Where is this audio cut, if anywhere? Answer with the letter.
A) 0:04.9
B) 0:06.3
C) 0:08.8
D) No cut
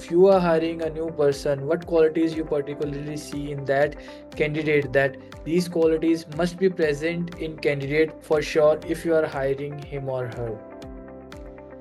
D